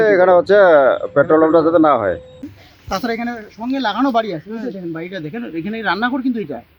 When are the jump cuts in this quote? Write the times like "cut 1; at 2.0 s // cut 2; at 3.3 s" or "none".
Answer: none

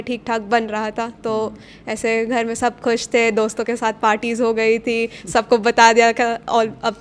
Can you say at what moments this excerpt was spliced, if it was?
none

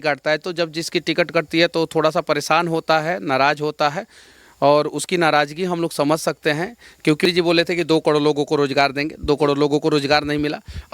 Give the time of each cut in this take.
cut 1; at 7.2 s

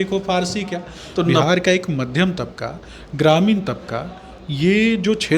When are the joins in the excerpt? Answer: cut 1; at 1.4 s

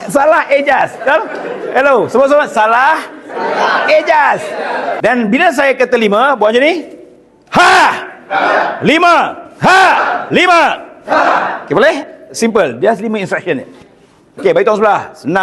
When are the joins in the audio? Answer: cut 1; at 4.9 s

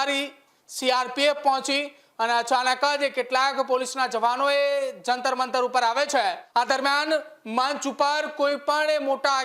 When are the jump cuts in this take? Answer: cut 1; at 6.4 s

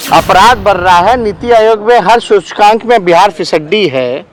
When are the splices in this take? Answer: none

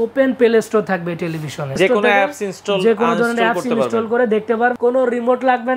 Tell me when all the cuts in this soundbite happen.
cut 1; at 1.8 s // cut 2; at 4.7 s

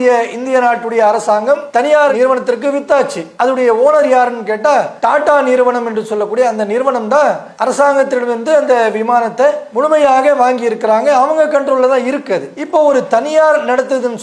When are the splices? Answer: cut 1; at 2.1 s // cut 2; at 3.3 s

